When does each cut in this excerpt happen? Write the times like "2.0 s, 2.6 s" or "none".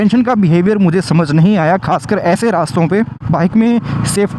3.2 s